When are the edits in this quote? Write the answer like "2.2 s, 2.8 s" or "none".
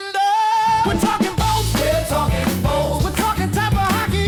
none